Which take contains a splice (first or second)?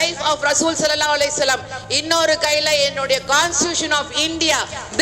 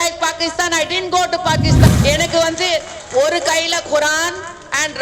second